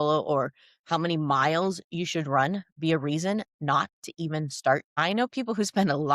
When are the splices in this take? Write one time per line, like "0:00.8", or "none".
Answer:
0:04.9